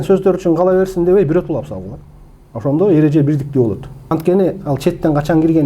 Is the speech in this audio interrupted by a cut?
yes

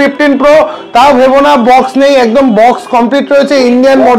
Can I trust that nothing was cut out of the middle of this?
yes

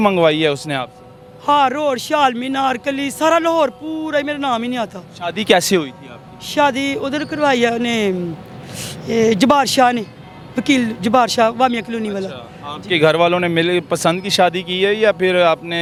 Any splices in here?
no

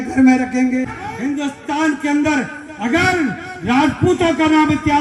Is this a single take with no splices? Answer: no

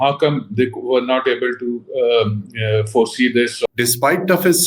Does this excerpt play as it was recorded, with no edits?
no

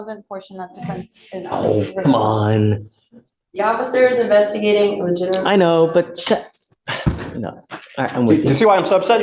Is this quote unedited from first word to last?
yes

